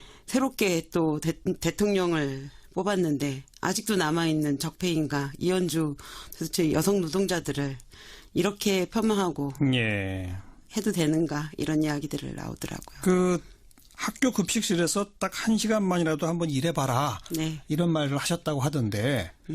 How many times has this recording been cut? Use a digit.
1